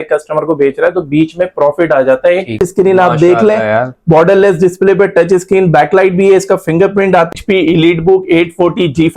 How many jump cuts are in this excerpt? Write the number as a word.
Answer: two